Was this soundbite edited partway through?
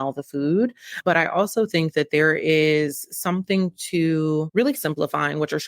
yes; 1 cut; at 4.8 s

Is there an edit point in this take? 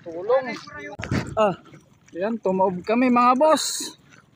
yes; 1 cut; at 1.0 s

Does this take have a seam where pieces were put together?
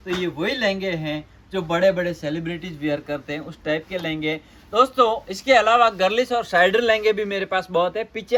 no; 0 cuts

